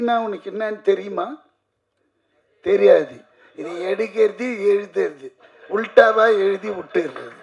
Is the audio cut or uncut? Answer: uncut